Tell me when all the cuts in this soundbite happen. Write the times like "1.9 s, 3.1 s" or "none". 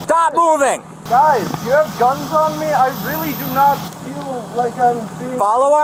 none